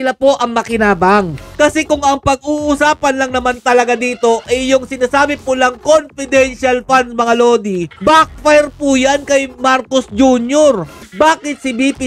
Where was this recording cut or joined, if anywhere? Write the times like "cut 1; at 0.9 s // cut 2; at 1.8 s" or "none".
cut 1; at 1.5 s // cut 2; at 7.9 s // cut 3; at 11.0 s